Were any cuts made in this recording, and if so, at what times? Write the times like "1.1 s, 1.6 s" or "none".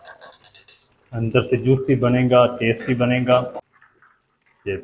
3.6 s